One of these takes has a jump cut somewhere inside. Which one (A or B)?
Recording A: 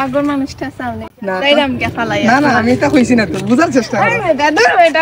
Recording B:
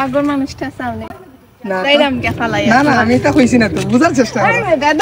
A